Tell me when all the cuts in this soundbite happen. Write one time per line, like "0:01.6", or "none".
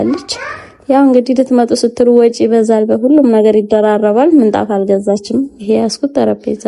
0:05.6